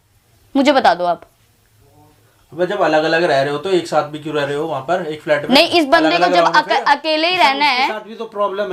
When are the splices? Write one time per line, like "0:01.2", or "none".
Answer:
none